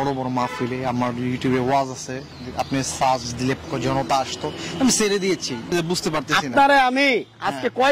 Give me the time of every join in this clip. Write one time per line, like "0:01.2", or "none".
0:03.6
0:06.0